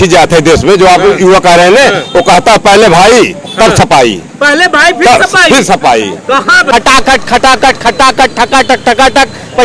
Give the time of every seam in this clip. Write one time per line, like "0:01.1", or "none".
0:06.6